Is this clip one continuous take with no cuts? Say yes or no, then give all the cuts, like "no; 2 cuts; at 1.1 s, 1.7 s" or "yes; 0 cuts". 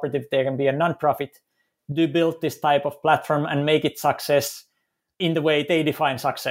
no; 1 cut; at 5.2 s